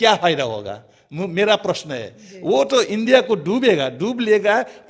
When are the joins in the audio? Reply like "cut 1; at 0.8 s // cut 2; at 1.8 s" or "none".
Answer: none